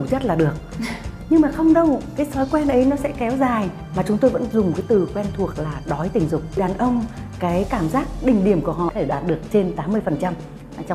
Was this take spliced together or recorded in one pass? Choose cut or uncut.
cut